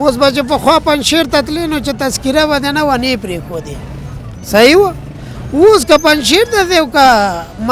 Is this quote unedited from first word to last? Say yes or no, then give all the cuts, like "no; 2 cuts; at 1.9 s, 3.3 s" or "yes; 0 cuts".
yes; 0 cuts